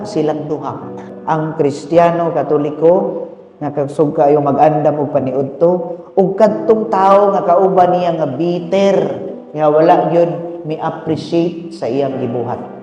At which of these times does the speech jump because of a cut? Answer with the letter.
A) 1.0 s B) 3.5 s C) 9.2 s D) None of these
A